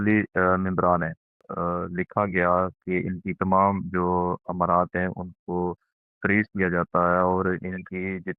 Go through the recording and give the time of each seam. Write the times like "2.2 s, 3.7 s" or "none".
1.5 s

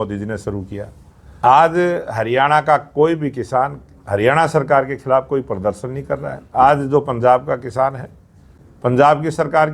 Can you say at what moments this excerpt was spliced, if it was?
1.2 s

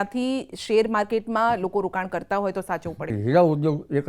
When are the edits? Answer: 3.1 s

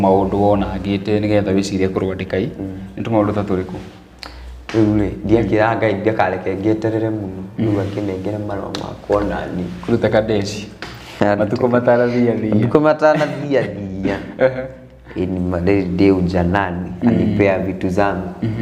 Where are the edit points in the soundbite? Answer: none

